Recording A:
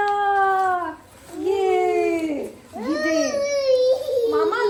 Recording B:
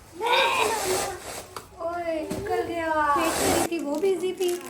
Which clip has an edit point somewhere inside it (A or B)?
B